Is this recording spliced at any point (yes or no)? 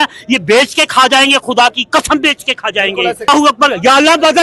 yes